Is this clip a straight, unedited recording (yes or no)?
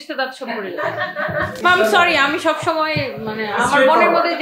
yes